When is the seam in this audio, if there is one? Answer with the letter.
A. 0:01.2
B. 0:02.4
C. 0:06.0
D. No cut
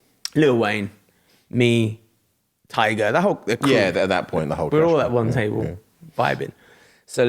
D